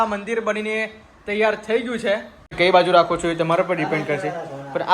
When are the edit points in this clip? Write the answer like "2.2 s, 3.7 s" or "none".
2.6 s